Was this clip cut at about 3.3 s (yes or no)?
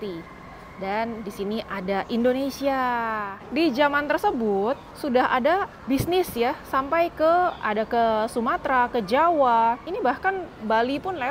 yes